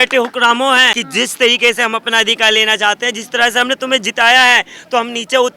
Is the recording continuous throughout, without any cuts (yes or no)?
no